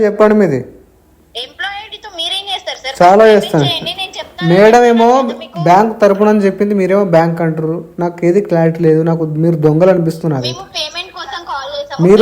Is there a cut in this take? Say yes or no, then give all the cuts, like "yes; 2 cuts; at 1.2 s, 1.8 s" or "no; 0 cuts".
no; 0 cuts